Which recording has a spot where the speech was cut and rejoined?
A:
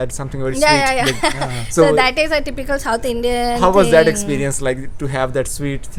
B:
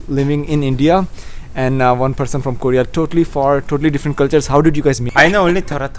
B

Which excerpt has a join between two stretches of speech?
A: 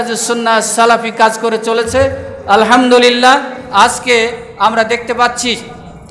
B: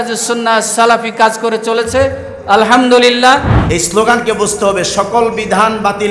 B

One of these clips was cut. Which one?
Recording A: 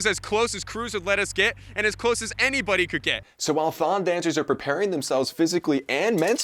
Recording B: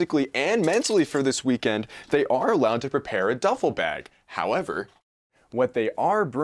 A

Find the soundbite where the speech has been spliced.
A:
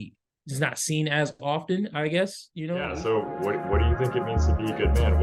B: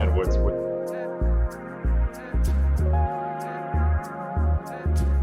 A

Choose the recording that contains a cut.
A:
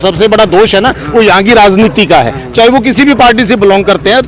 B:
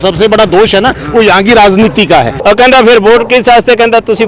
B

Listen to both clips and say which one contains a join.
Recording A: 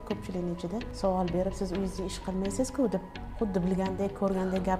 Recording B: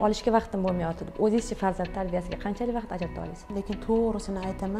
B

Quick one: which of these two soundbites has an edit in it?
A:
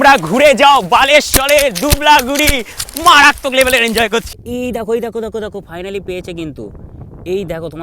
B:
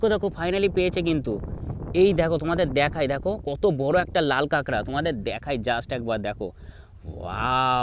A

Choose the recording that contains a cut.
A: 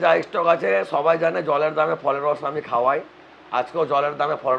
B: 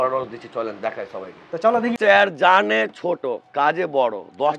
B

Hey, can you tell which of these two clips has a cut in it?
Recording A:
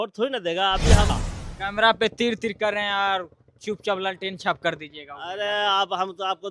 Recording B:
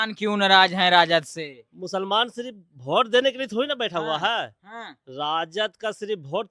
A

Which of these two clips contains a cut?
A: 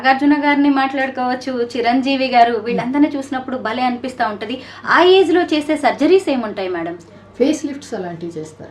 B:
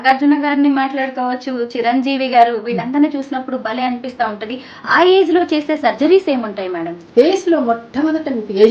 B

